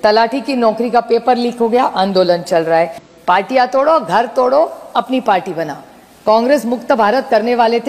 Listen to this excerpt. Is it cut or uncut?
cut